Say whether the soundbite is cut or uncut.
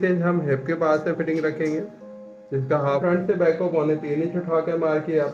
cut